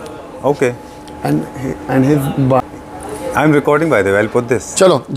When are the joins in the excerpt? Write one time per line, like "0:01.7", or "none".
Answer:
0:02.6